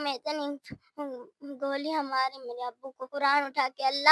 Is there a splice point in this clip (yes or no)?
yes